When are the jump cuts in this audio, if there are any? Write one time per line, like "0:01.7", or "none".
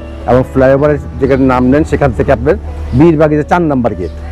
none